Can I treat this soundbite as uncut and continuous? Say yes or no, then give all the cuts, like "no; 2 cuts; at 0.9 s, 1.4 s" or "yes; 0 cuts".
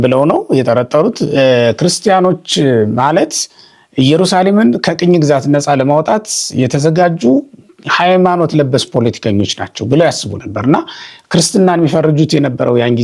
yes; 0 cuts